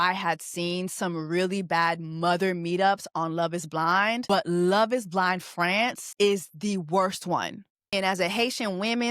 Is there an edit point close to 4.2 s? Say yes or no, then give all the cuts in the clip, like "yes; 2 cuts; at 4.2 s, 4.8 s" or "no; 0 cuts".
yes; 3 cuts; at 4.2 s, 6.0 s, 7.9 s